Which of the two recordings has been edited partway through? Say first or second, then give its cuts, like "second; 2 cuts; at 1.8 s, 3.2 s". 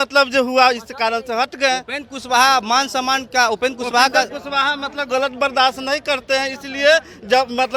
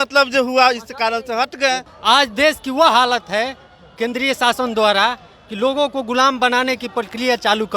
second; 1 cut; at 1.9 s